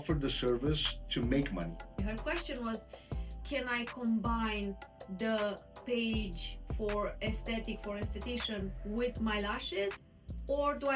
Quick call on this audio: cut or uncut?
cut